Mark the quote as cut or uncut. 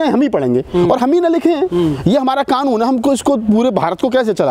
uncut